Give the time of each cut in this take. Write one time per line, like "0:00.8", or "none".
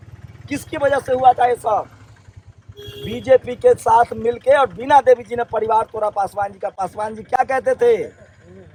none